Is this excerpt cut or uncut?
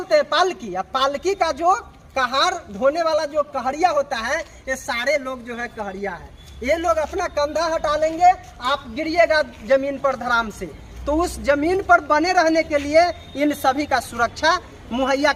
uncut